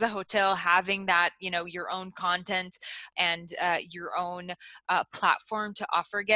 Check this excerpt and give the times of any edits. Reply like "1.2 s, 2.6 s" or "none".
3.0 s